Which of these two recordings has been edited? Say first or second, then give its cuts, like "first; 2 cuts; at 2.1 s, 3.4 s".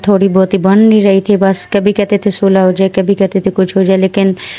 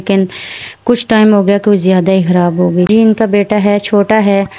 second; 1 cut; at 2.9 s